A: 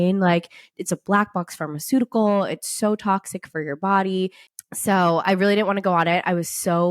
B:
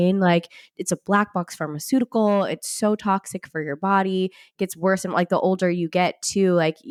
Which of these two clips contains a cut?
A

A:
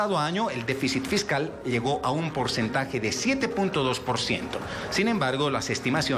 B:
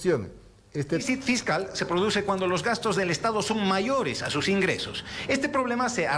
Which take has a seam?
B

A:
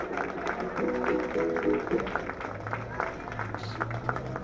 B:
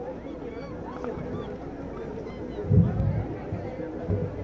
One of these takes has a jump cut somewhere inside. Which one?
A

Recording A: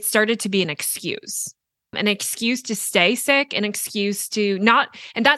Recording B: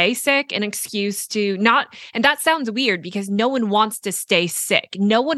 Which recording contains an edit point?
A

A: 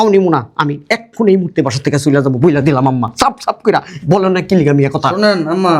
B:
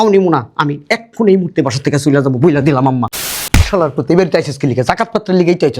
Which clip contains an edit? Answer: B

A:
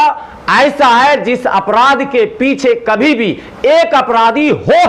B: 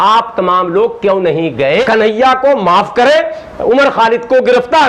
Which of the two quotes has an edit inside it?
B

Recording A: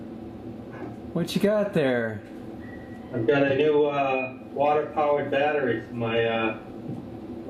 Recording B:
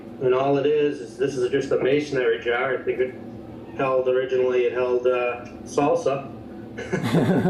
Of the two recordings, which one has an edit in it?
B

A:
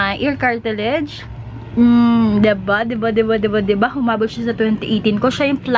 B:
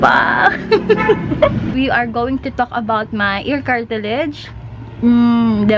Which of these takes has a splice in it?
B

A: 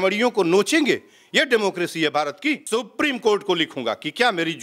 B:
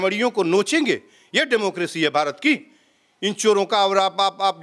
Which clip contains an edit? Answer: A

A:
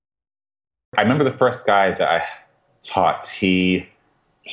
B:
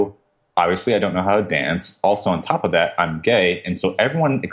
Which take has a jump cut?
A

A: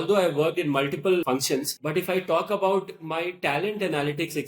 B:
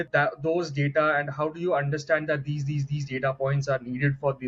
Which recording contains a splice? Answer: A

